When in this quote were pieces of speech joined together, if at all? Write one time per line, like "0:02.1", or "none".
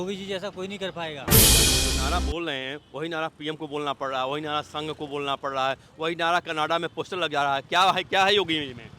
0:01.2
0:01.9